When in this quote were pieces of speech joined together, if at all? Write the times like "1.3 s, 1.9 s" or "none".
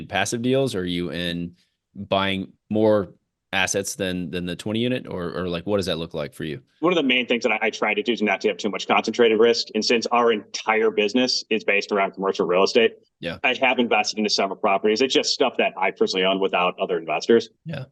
6.8 s